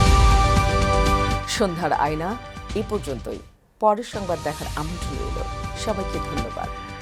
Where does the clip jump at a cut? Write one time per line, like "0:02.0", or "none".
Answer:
none